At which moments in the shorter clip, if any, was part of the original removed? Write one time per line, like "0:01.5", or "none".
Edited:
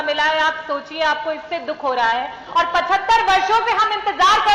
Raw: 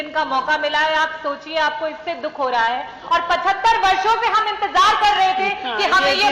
none